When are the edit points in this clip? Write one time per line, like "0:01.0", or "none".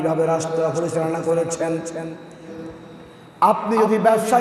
0:02.6